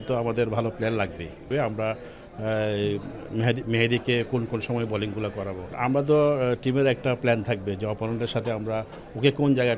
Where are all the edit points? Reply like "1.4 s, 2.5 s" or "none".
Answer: 1.5 s, 5.7 s